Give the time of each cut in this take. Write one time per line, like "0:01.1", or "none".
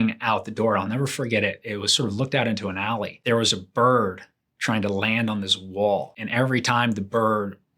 0:03.1
0:06.2